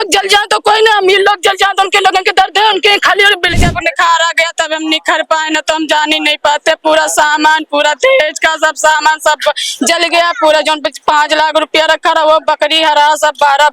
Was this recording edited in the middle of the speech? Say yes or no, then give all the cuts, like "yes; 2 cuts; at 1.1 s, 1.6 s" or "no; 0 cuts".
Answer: yes; 1 cut; at 3.5 s